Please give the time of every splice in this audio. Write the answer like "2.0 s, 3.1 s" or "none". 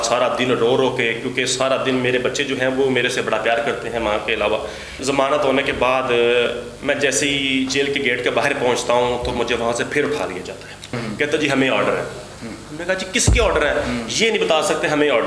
4.9 s, 10.9 s